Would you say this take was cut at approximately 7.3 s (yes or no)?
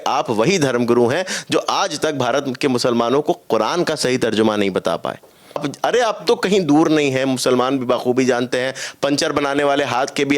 no